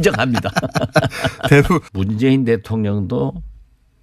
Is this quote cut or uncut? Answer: cut